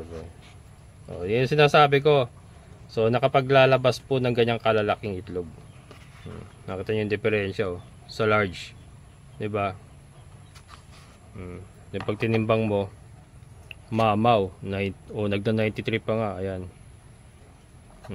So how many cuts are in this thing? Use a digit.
0